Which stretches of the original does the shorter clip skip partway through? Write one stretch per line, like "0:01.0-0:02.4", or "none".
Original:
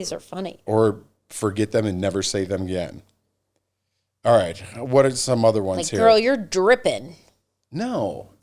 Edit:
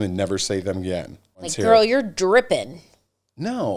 0:03.3-0:05.8

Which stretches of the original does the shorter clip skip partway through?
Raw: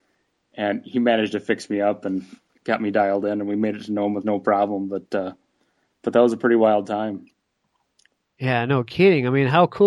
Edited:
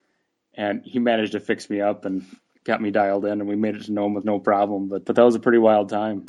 0:05.0-0:06.0

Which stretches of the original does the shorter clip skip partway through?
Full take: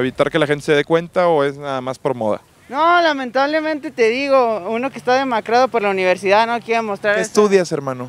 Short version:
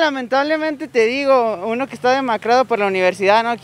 none

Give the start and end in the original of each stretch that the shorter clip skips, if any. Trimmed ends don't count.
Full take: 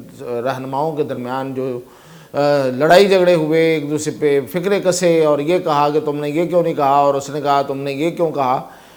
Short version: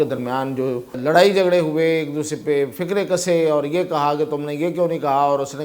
0:02.0-0:02.7

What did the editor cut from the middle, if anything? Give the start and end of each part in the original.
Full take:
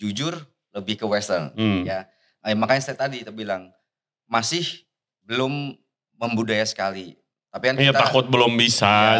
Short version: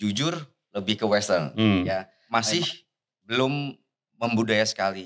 0:02.1-0:04.1

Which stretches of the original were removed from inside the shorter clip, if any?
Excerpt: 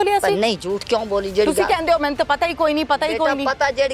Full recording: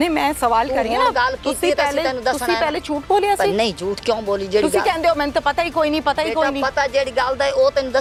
none

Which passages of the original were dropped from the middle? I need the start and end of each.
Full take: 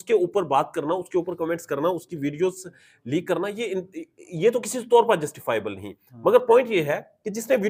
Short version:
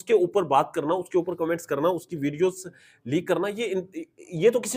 none

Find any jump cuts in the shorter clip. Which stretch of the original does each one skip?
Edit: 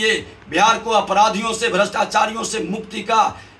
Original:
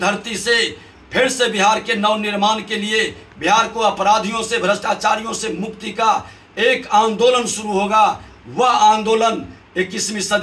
none

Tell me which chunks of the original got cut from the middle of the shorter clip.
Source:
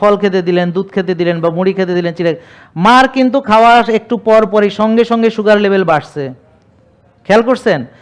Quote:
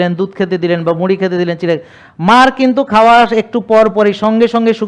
none

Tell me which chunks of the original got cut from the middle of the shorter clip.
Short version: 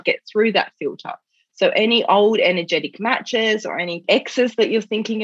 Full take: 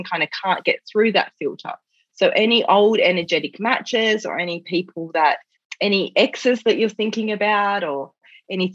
0:04.6-0:06.1

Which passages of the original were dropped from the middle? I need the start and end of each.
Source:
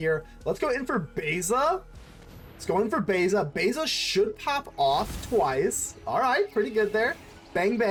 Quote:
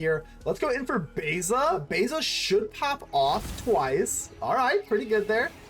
0:01.9-0:03.5

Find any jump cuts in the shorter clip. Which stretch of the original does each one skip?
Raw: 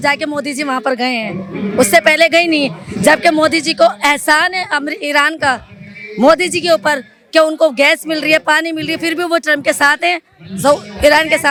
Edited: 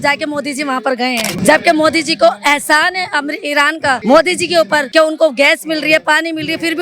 0:01.3-0:02.9
0:05.6-0:06.1
0:07.0-0:07.3

